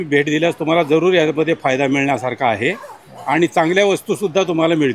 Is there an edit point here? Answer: no; 0 cuts

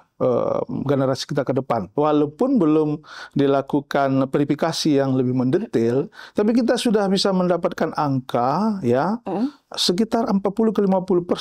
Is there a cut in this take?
yes; 1 cut; at 1.9 s

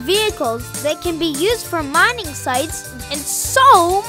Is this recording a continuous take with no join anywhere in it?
no; 1 cut; at 2.9 s

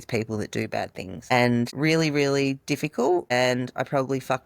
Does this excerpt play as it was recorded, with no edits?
no; 1 cut; at 3.3 s

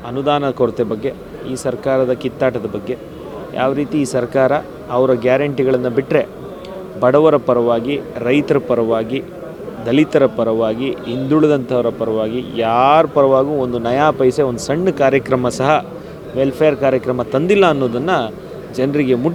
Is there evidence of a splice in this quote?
no; 0 cuts

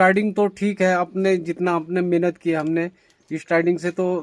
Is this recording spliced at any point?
no; 0 cuts

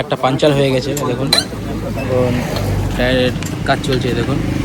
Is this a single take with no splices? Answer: yes; 0 cuts

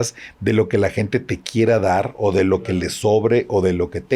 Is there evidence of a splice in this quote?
no; 0 cuts

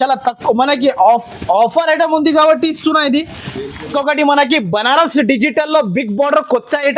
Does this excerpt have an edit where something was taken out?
yes; 1 cut; at 3.8 s

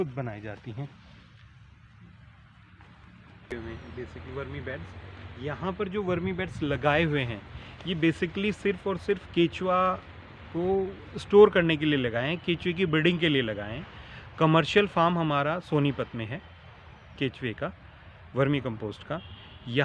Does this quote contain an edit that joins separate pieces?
yes; 1 cut; at 3.4 s

